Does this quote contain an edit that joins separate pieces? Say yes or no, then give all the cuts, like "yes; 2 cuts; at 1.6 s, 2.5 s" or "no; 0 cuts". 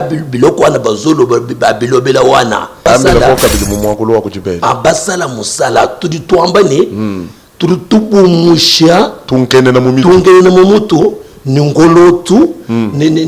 yes; 1 cut; at 2.8 s